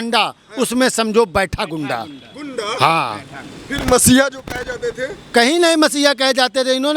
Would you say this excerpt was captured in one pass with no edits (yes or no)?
yes